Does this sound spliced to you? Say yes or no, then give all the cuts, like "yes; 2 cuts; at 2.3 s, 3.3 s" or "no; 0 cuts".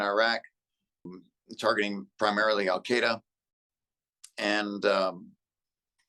yes; 1 cut; at 1.0 s